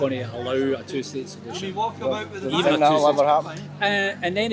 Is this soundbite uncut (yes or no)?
yes